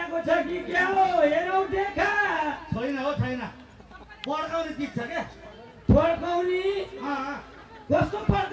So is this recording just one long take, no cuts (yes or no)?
yes